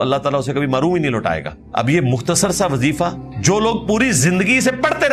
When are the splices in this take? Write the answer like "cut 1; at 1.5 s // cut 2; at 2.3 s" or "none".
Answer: cut 1; at 1.6 s // cut 2; at 3.3 s